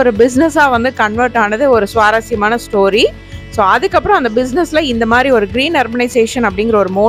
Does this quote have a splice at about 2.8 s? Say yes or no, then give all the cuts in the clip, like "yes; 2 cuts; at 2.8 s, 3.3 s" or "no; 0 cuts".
no; 0 cuts